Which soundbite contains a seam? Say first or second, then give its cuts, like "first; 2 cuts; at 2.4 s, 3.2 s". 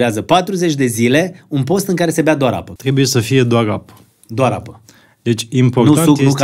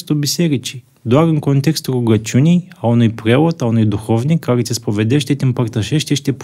first; 1 cut; at 2.7 s